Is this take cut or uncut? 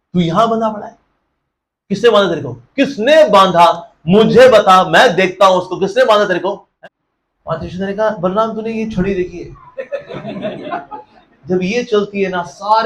cut